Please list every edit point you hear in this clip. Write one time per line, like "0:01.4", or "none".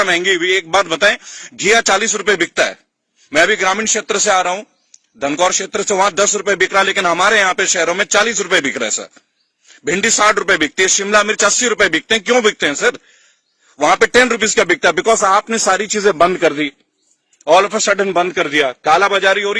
none